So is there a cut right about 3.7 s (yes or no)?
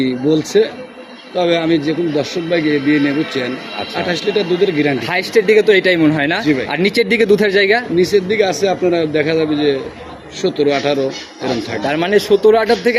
no